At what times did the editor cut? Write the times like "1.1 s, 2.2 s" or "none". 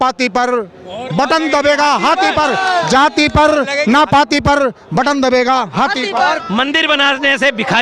6.4 s